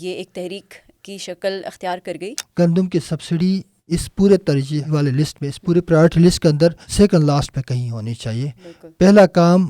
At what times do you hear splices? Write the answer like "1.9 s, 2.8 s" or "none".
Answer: 2.4 s, 3.7 s, 4.9 s, 6.8 s